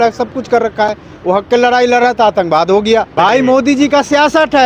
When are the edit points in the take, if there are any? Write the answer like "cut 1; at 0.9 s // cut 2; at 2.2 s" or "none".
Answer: cut 1; at 3.1 s